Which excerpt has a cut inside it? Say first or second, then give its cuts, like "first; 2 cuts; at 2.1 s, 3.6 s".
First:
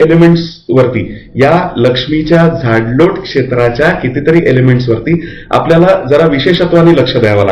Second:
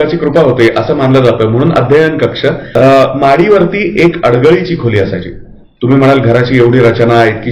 second; 1 cut; at 2.7 s